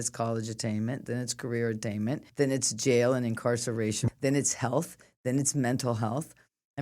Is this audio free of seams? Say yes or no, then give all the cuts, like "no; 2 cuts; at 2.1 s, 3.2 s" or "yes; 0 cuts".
no; 2 cuts; at 2.3 s, 4.0 s